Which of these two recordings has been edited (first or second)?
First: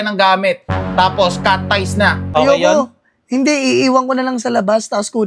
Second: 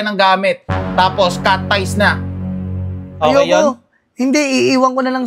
first